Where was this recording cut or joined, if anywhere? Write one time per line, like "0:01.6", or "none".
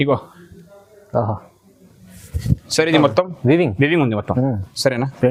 none